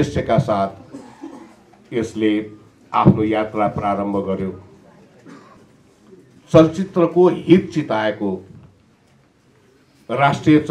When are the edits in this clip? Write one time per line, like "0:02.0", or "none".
0:05.6